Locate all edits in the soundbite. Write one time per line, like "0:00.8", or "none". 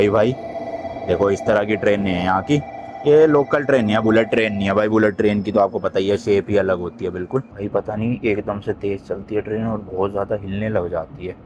0:07.6